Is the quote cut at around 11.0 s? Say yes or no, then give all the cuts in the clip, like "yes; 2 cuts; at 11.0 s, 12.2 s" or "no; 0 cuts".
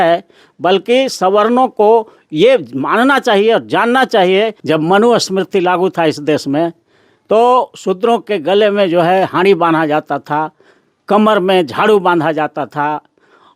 no; 1 cut; at 4.6 s